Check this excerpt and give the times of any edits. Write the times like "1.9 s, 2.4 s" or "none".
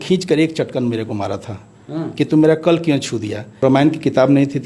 3.6 s

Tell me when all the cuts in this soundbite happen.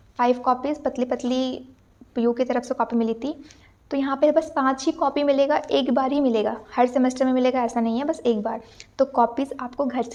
none

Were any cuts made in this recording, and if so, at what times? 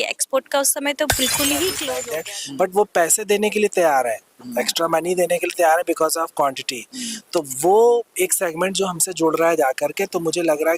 1.9 s

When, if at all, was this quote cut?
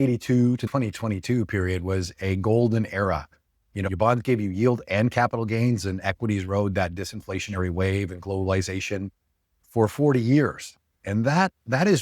3.8 s

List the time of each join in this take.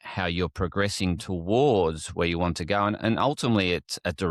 none

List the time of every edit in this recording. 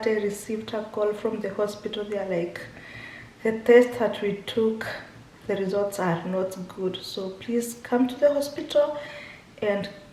none

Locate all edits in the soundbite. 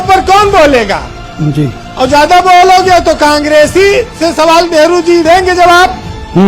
none

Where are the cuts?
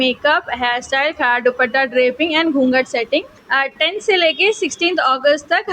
3.4 s

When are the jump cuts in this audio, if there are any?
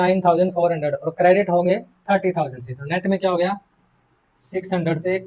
none

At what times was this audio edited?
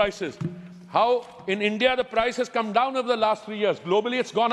none

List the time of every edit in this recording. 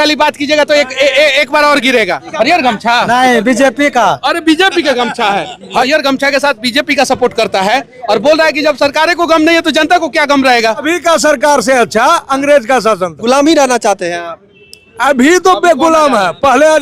2.3 s, 5.9 s, 10.8 s, 13.2 s

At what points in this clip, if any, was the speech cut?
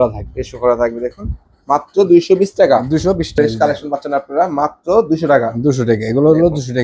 3.3 s

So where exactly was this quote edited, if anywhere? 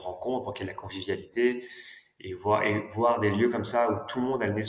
none

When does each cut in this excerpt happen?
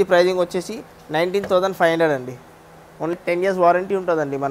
3.1 s

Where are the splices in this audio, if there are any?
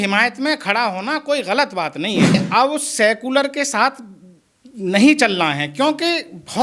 2.4 s

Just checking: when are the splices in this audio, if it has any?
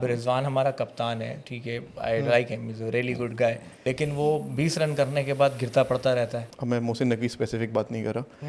3.7 s, 6.5 s

